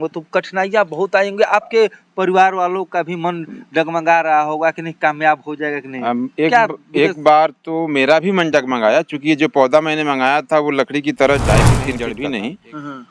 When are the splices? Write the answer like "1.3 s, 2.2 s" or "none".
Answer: 12.0 s

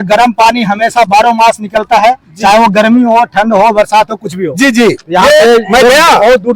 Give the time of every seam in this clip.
none

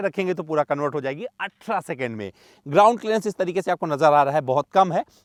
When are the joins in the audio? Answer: none

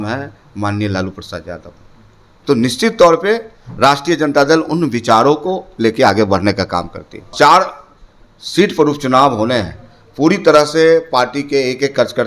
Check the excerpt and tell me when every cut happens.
7.3 s

